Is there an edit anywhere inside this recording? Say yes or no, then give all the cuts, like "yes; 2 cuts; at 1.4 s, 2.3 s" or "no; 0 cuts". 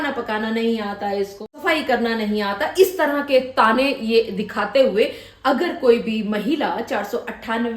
yes; 1 cut; at 1.5 s